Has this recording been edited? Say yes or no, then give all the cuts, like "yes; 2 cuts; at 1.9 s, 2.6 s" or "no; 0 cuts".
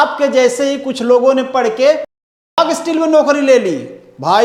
no; 0 cuts